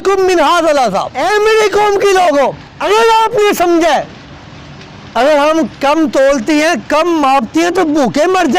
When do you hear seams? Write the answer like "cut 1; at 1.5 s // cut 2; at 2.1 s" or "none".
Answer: cut 1; at 1.1 s // cut 2; at 2.7 s

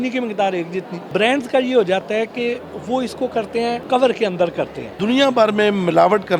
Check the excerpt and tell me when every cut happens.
cut 1; at 1.0 s // cut 2; at 3.9 s // cut 3; at 4.8 s

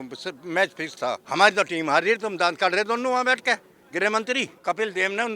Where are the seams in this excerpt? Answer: cut 1; at 1.2 s // cut 2; at 4.5 s

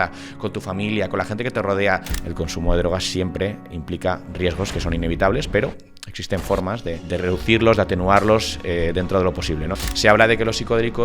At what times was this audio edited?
cut 1; at 2.1 s // cut 2; at 7.0 s // cut 3; at 9.7 s

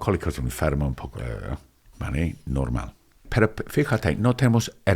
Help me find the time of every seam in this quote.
cut 1; at 3.3 s

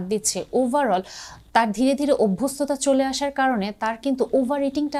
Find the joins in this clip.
none

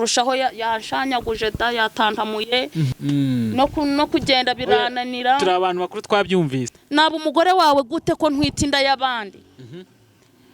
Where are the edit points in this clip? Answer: cut 1; at 2.8 s // cut 2; at 6.7 s

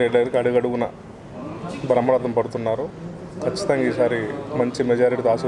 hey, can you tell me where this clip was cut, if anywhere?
none

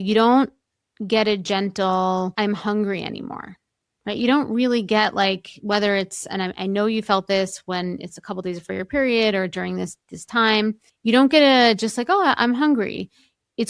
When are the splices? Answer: cut 1; at 2.3 s

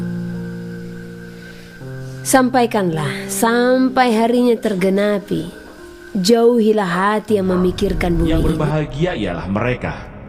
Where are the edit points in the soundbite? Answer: cut 1; at 8.5 s

